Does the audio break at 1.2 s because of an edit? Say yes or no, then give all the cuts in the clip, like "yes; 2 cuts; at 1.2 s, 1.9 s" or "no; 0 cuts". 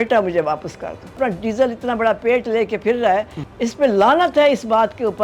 yes; 2 cuts; at 1.2 s, 3.4 s